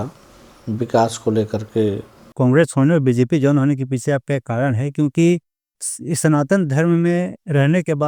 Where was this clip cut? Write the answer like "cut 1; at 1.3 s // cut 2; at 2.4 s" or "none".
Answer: cut 1; at 2.3 s